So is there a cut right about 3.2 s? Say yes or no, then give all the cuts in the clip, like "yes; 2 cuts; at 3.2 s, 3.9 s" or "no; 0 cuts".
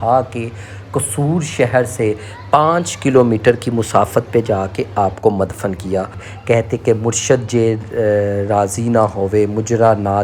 no; 1 cut; at 6.2 s